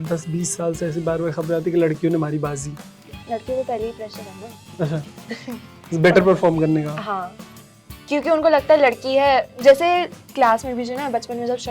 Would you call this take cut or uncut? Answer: uncut